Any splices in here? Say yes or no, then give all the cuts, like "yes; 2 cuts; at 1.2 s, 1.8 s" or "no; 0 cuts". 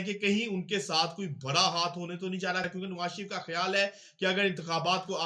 yes; 1 cut; at 2.7 s